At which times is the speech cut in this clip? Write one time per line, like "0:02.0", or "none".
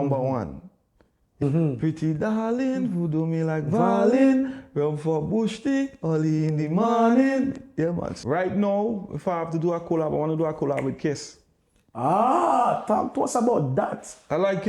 0:01.4
0:08.1